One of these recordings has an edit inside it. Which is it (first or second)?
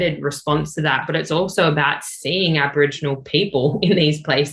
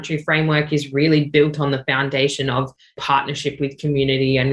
second